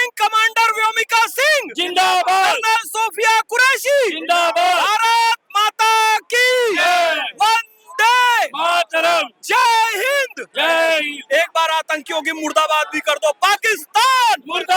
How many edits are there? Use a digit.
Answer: 0